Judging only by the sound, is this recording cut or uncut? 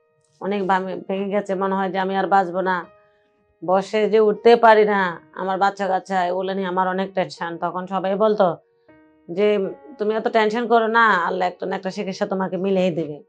uncut